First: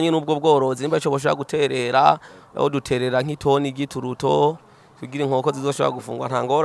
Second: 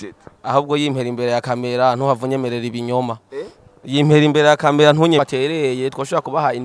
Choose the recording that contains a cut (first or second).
second